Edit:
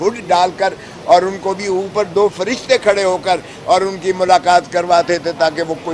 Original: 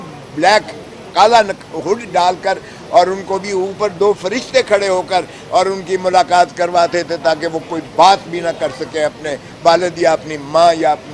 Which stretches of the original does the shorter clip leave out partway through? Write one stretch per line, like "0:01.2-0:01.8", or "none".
none